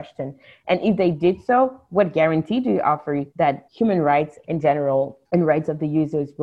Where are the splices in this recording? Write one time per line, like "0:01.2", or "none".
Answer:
0:03.5
0:05.2